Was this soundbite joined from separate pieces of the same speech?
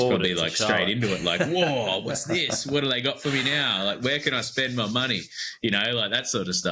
no; 0 cuts

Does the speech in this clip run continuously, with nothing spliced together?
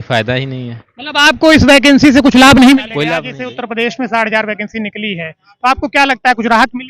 no; 1 cut; at 3.3 s

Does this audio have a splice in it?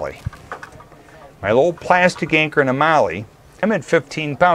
yes; 1 cut; at 3.5 s

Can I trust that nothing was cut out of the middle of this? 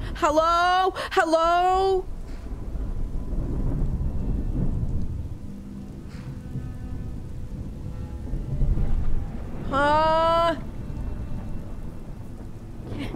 yes; 0 cuts

